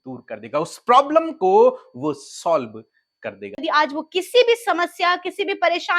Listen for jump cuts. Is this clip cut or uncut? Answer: cut